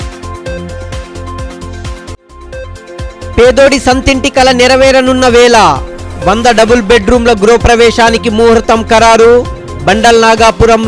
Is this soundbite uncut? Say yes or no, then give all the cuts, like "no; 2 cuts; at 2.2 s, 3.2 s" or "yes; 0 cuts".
no; 1 cut; at 2.1 s